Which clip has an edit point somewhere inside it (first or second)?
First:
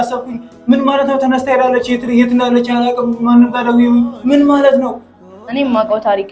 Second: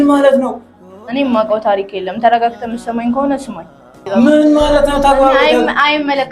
second